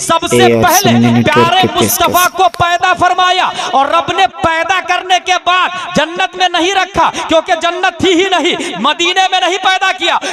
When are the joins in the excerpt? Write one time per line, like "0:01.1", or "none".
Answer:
none

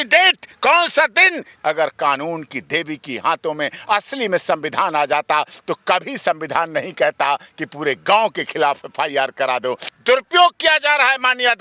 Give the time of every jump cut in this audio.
0:01.5
0:09.9

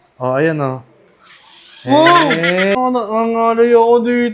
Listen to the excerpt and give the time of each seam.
0:02.8

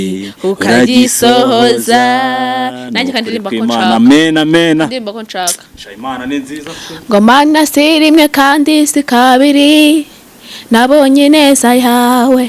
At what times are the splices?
none

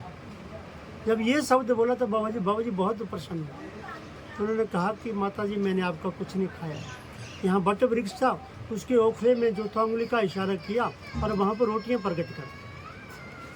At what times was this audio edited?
none

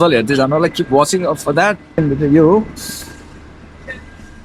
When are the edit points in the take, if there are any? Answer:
0:02.0

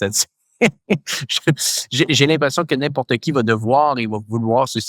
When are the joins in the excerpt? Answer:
none

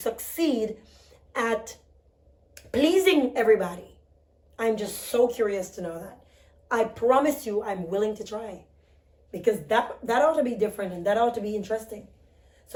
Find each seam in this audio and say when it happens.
none

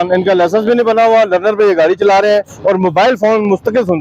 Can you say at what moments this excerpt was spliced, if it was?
none

